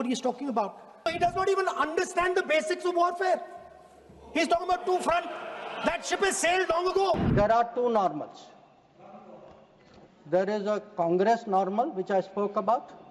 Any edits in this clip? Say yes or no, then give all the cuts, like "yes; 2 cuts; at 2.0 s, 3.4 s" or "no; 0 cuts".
yes; 2 cuts; at 1.1 s, 7.3 s